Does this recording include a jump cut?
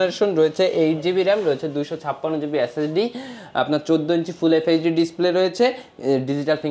no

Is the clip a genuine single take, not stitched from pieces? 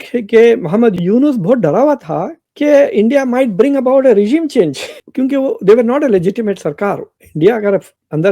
no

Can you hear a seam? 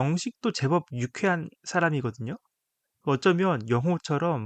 no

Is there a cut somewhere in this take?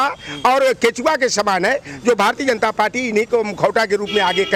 no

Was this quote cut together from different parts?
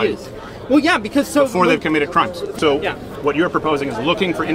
yes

